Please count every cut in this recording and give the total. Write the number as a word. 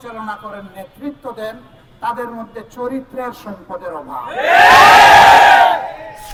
zero